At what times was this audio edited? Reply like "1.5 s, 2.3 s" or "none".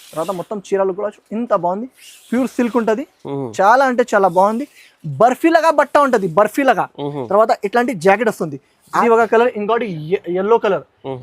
9.0 s